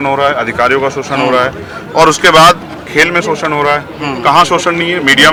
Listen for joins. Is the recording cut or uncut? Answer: uncut